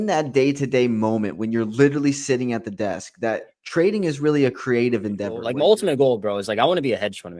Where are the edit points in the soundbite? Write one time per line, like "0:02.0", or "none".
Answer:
0:05.4